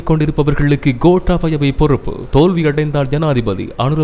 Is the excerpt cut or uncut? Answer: uncut